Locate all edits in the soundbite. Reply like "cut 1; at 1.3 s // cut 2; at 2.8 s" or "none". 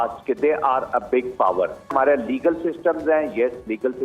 cut 1; at 1.9 s